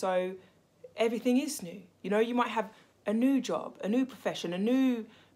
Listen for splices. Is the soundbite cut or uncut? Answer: uncut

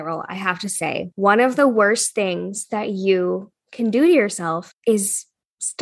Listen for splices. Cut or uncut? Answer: cut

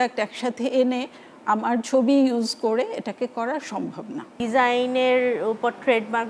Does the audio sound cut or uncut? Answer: cut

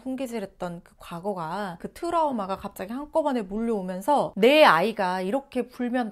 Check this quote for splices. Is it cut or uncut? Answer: uncut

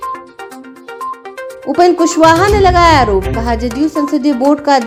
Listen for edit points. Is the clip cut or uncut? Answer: uncut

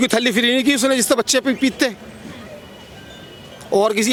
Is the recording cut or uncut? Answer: uncut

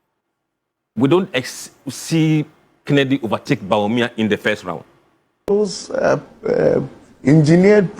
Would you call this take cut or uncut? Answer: cut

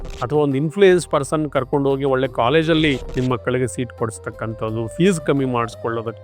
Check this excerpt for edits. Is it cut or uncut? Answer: cut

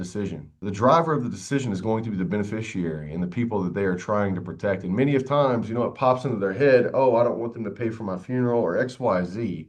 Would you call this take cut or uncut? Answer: uncut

